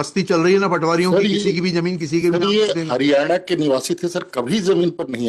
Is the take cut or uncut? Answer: uncut